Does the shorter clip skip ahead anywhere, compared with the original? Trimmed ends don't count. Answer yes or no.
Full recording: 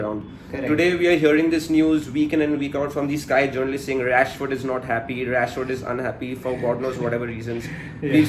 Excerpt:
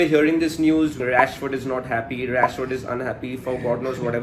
yes